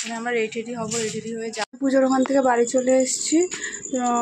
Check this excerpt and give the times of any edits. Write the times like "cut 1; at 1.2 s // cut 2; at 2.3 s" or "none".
cut 1; at 1.9 s